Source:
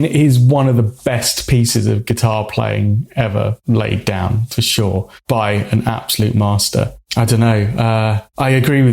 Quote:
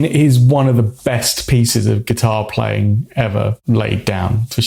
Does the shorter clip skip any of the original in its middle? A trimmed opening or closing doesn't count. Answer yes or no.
no